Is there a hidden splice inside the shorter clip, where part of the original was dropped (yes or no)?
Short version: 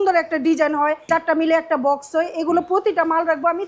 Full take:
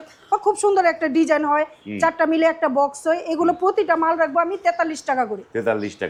yes